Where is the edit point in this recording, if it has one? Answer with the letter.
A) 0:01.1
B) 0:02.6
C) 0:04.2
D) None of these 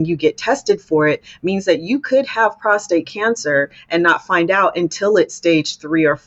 D